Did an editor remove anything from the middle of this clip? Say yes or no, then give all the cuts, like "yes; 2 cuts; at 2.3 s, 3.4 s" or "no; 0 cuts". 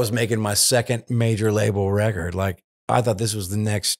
no; 0 cuts